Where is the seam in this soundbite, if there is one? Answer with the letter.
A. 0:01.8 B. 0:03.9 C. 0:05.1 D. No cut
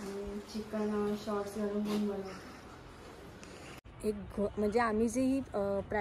B